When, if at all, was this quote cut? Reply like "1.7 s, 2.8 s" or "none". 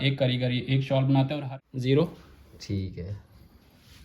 1.4 s